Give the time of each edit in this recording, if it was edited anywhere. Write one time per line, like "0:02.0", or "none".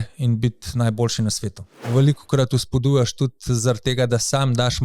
0:01.9